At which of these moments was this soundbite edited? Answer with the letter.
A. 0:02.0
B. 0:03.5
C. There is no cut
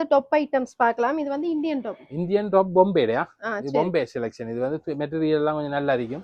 C